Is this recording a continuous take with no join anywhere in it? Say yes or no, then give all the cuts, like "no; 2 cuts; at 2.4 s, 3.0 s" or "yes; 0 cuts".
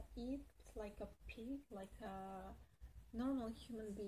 yes; 0 cuts